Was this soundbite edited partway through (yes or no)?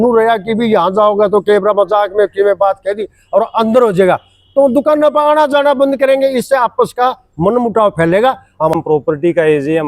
yes